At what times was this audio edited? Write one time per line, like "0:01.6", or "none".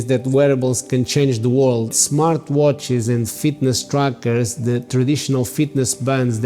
0:02.0